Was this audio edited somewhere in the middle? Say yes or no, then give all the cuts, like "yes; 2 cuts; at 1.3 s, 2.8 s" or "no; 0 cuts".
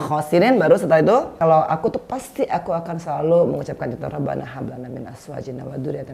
yes; 1 cut; at 1.4 s